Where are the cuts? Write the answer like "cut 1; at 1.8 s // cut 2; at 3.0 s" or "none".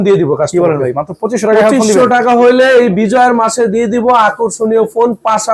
none